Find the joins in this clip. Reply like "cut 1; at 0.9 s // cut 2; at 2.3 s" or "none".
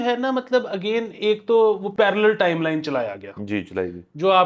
cut 1; at 1.9 s